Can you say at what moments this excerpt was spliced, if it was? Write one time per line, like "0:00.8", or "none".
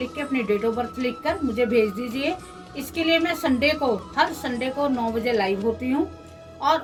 none